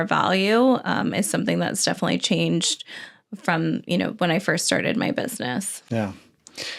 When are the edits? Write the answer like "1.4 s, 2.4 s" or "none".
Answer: none